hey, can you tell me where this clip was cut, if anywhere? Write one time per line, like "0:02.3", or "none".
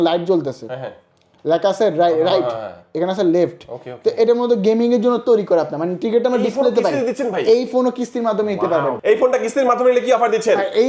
0:09.0